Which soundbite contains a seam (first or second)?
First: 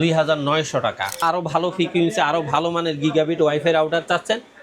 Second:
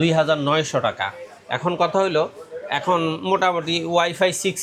first